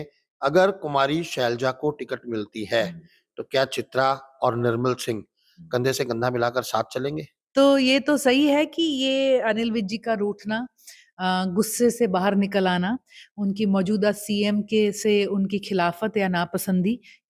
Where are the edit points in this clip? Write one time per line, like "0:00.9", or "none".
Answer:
0:07.3